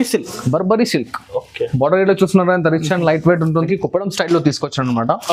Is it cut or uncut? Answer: cut